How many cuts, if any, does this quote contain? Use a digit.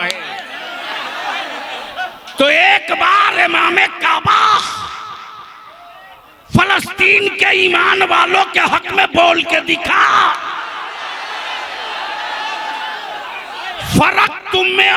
0